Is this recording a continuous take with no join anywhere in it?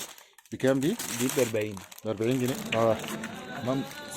no; 1 cut; at 2.5 s

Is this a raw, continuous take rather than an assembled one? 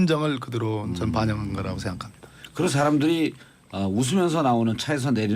no; 1 cut; at 3.1 s

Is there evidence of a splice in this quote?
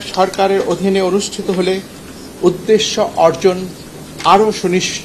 no; 0 cuts

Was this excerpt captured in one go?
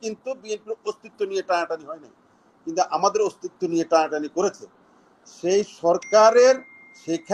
yes; 0 cuts

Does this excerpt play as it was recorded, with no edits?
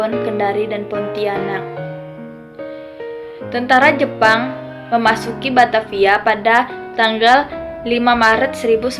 no; 2 cuts; at 1.6 s, 3.0 s

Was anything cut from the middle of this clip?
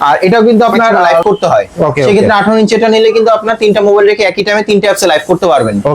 yes; 1 cut; at 1.2 s

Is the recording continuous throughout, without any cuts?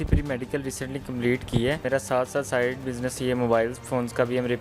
no; 1 cut; at 1.8 s

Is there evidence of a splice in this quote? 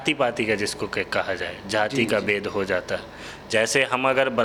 no; 0 cuts

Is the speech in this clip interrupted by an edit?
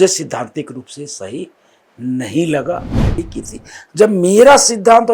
yes; 1 cut; at 3.2 s

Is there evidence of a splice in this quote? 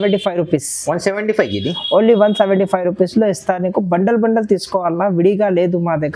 no; 0 cuts

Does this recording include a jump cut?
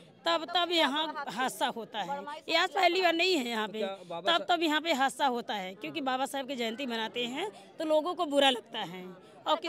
no; 0 cuts

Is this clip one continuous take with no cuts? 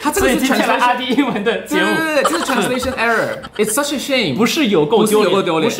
no; 1 cut; at 3.4 s

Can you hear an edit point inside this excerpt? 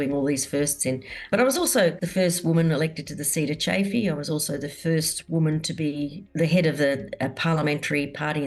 yes; 3 cuts; at 1.3 s, 2.0 s, 6.2 s

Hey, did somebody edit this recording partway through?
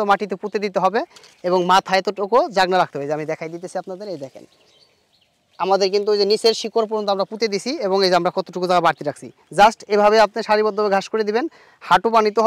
no; 0 cuts

